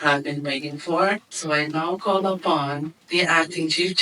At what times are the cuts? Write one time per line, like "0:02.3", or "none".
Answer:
0:01.3
0:02.9